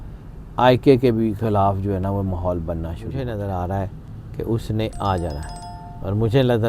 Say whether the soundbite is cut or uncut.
cut